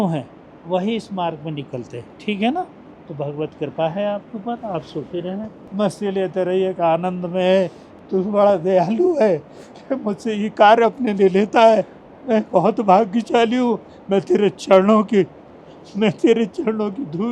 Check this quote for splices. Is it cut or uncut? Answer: cut